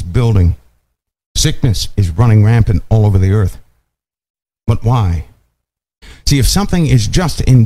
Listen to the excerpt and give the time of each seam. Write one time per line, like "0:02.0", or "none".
0:06.0